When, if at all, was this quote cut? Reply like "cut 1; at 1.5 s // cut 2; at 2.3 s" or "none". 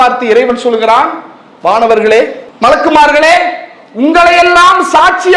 cut 1; at 2.4 s